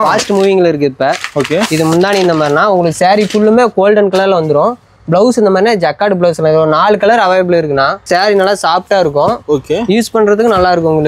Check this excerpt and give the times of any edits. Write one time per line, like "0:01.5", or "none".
0:08.1

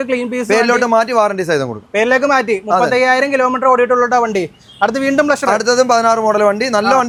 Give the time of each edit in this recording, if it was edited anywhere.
none

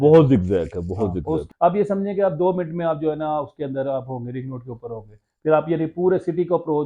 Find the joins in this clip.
0:01.4

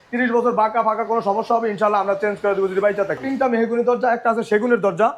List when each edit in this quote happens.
0:03.3

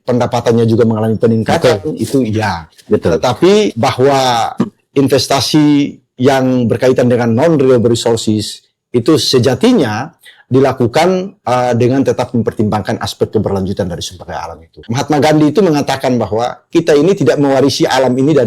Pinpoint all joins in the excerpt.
0:14.8

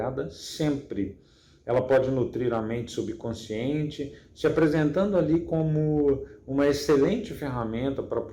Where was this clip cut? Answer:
none

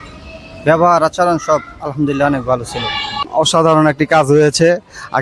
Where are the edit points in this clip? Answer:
none

